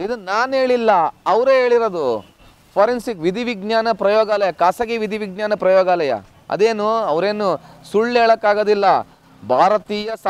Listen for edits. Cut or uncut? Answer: uncut